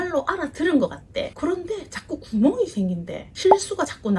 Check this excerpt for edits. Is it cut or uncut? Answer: uncut